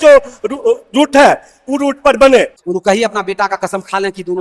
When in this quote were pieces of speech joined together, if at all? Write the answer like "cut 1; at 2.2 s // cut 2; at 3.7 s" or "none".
cut 1; at 2.6 s